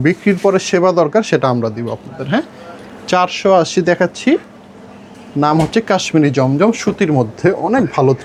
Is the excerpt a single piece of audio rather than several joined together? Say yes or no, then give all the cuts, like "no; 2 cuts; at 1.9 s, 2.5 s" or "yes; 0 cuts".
yes; 0 cuts